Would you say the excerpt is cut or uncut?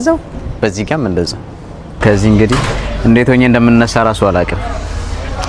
cut